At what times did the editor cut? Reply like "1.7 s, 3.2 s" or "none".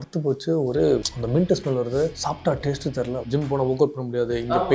1.1 s, 2.2 s, 3.3 s